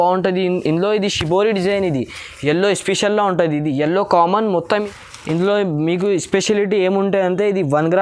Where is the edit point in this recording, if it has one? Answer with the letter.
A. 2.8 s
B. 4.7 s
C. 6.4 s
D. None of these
B